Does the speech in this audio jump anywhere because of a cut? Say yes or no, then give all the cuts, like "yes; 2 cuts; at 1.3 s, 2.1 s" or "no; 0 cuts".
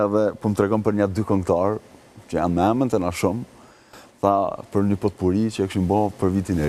no; 0 cuts